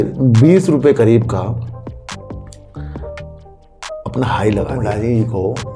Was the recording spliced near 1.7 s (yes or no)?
no